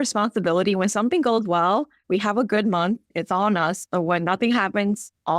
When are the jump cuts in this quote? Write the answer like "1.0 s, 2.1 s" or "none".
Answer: 2.0 s, 3.1 s